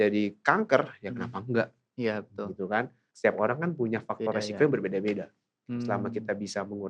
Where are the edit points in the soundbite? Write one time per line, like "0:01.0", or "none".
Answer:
0:03.0